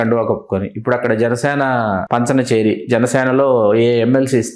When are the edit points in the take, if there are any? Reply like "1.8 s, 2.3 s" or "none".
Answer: 2.0 s